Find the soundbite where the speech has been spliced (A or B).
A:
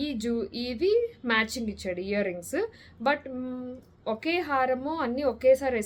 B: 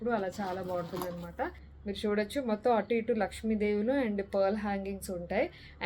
B